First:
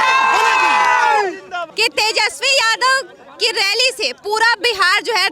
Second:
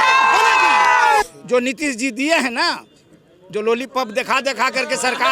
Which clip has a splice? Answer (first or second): second